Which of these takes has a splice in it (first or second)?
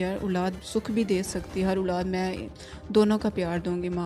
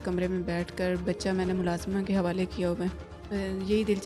second